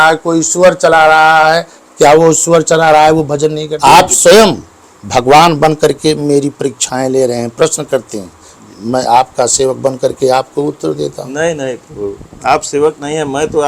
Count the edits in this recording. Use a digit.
1